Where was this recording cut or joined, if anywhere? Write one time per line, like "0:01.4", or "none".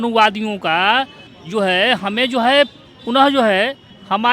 none